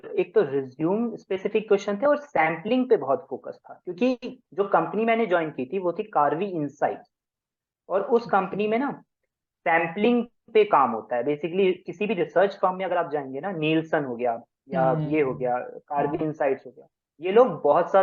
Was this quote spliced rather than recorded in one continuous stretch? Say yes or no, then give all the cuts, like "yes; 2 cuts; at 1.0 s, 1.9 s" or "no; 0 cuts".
no; 0 cuts